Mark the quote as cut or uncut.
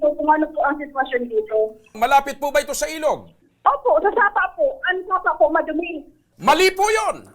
cut